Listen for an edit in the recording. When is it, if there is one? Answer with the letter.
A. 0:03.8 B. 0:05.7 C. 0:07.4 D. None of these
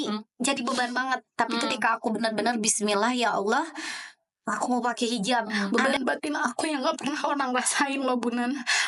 B